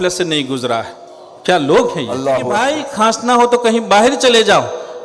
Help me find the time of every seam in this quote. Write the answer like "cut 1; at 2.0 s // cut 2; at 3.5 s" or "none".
cut 1; at 2.6 s